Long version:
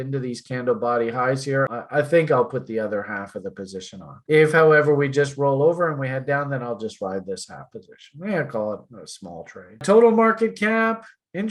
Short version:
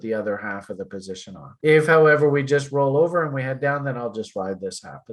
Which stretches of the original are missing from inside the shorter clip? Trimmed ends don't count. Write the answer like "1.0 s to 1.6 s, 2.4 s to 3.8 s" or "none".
none